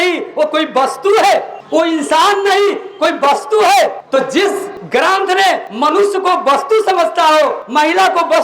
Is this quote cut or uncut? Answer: cut